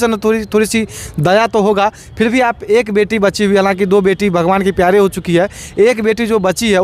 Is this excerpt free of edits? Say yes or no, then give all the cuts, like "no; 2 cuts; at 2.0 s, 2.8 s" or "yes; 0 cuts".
yes; 0 cuts